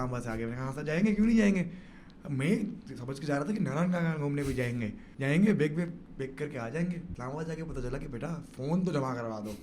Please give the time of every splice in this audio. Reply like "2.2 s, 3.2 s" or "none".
5.0 s, 7.1 s